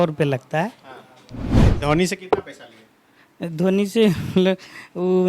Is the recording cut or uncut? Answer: cut